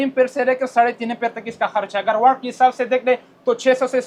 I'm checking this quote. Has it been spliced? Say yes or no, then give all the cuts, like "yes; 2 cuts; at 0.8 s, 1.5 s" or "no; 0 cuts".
no; 0 cuts